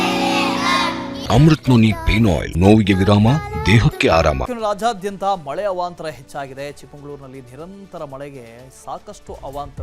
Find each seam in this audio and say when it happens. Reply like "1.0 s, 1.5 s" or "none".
1.2 s, 2.5 s, 4.4 s